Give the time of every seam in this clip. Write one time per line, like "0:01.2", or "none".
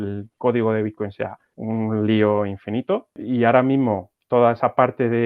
0:01.5
0:03.2